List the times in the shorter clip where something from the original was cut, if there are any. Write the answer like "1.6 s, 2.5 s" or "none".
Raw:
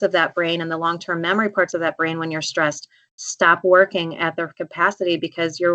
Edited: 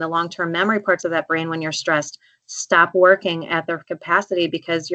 none